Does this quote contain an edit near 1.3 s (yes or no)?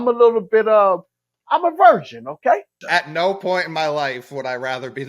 no